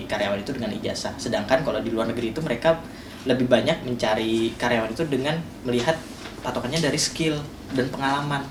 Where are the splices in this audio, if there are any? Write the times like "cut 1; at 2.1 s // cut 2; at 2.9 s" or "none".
none